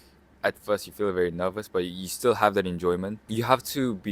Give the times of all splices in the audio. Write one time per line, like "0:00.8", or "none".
0:03.2